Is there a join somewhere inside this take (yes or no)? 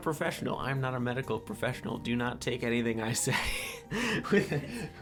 no